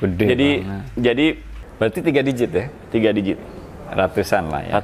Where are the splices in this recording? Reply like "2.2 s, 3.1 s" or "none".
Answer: 1.5 s